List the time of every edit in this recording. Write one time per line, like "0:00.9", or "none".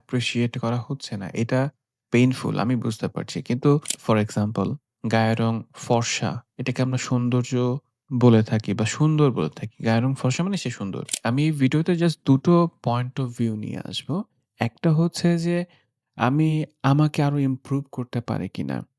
0:03.9
0:11.2